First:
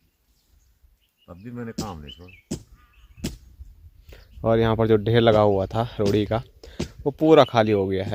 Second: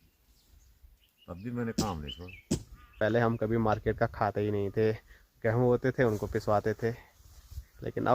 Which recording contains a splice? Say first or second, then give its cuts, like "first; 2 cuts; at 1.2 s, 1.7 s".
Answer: second; 1 cut; at 3.0 s